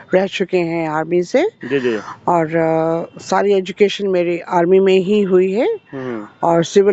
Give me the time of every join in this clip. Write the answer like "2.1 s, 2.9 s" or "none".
none